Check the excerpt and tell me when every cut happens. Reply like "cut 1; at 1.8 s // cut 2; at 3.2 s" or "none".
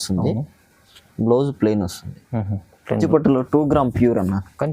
cut 1; at 2.9 s